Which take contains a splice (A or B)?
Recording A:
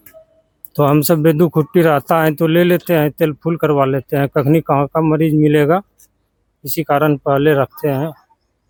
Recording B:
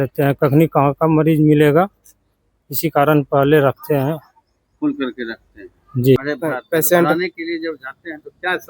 B